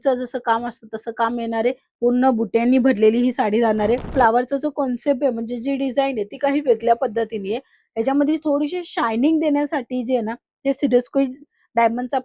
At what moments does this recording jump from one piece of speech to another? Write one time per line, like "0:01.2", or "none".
0:04.1